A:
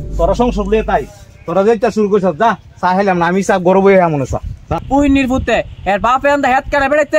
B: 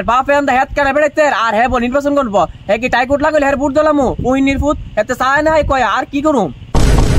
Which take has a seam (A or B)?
A